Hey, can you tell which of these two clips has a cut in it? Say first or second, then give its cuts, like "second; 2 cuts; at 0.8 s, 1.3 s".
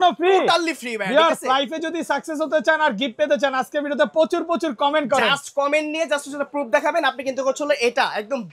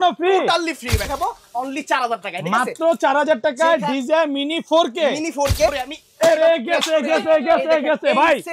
second; 2 cuts; at 1.1 s, 5.8 s